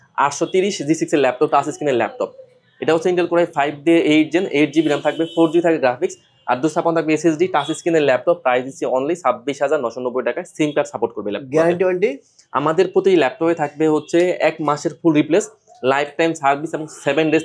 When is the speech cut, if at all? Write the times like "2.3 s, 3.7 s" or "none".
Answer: none